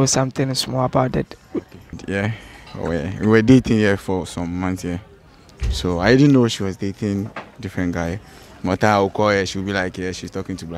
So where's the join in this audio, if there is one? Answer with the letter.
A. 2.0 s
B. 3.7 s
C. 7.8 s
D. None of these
A